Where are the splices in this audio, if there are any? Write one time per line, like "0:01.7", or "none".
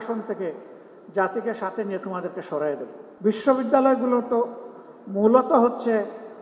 0:03.0